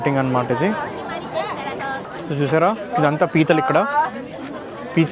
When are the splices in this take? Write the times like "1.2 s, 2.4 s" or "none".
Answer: 2.1 s